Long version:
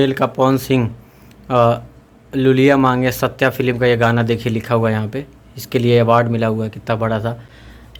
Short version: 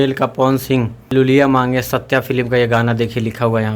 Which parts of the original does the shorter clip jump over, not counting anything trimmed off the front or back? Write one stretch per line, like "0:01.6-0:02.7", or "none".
0:01.0-0:02.3

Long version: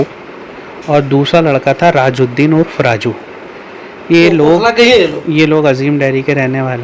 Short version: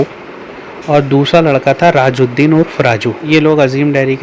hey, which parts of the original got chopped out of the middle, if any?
0:03.2-0:05.3

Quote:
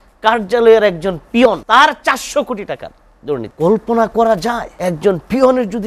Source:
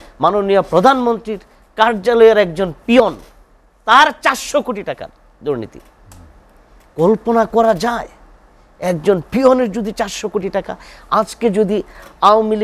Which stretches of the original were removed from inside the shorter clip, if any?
0:03.2-0:03.8
0:05.7-0:06.9
0:08.1-0:08.7

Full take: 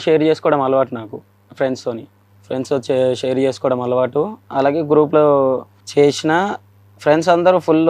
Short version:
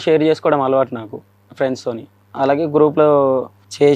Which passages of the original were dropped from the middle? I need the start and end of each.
0:02.2-0:04.4

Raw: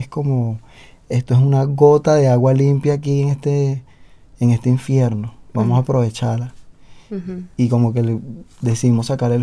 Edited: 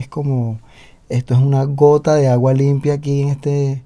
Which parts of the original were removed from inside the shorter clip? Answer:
none

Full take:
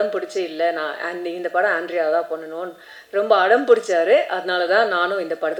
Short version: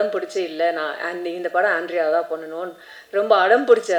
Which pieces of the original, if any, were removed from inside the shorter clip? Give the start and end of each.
none

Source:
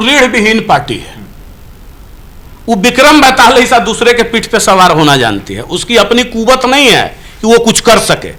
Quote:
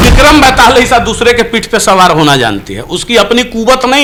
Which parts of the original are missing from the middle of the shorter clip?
none

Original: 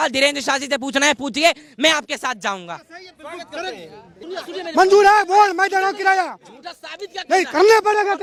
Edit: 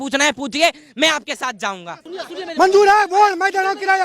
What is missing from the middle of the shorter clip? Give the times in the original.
0:02.8-0:04.1

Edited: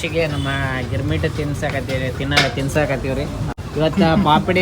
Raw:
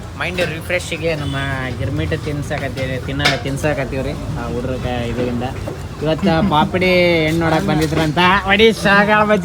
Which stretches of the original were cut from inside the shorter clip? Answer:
0:04.4-0:05.8

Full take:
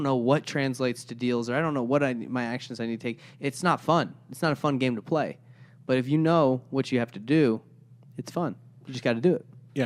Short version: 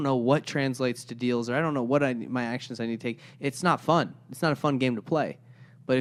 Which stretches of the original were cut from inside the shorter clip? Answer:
none

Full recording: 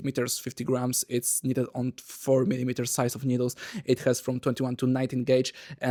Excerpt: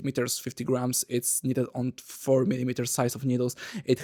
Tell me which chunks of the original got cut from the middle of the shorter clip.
none

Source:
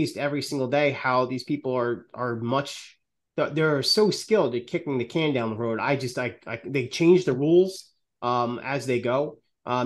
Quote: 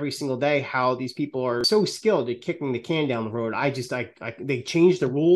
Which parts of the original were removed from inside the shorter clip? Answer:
0:01.9-0:03.9

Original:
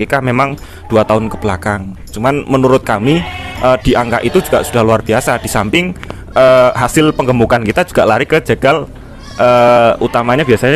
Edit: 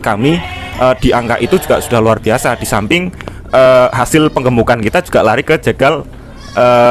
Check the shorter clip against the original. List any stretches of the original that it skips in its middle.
none

